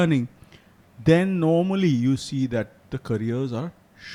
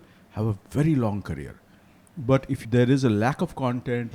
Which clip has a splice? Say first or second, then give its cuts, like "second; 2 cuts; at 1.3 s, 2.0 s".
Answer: second; 1 cut; at 2.6 s